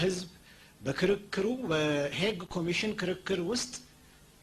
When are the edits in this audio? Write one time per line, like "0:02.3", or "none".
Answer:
none